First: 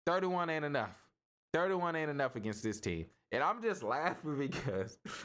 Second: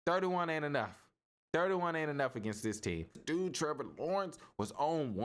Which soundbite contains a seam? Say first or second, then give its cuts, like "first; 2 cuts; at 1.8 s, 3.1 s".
second; 1 cut; at 3.2 s